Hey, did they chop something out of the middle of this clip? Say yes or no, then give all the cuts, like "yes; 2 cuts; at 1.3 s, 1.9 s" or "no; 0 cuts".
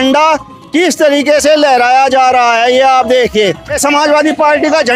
no; 0 cuts